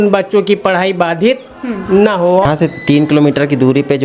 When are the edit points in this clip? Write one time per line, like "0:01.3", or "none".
0:02.4